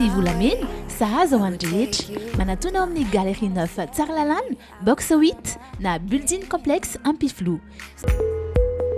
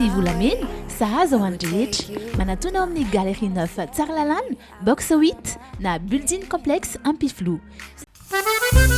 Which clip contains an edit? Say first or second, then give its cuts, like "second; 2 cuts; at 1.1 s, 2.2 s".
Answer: first; 1 cut; at 8.0 s